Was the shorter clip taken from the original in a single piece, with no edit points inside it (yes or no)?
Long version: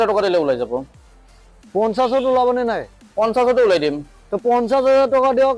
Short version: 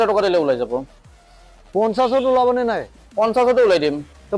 yes